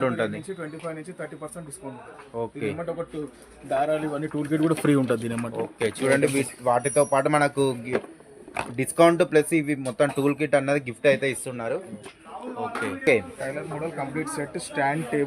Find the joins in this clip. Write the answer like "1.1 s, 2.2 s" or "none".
13.0 s